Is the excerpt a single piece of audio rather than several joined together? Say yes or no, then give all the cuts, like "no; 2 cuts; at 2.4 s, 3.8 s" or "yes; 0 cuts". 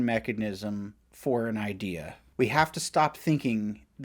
no; 1 cut; at 2.2 s